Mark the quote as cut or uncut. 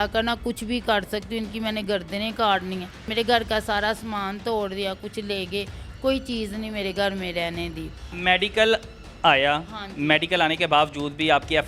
cut